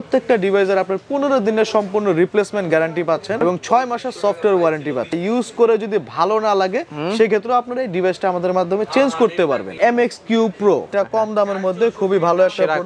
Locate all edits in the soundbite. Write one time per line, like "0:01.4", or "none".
0:03.4
0:05.2
0:09.7
0:10.9